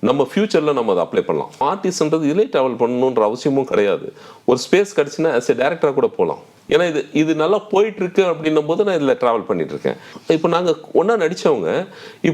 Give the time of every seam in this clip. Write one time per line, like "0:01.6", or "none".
0:01.6
0:06.5
0:10.1